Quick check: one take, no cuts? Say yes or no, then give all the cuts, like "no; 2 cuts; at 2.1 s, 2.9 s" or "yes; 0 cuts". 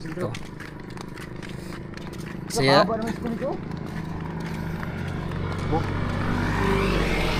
yes; 0 cuts